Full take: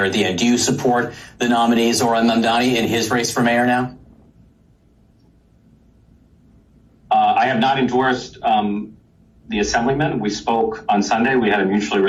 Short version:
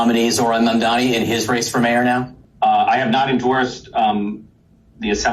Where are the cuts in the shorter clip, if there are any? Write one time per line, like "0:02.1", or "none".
0:02.4